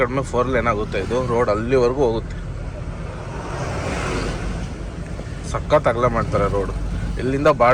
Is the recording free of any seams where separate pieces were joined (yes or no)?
yes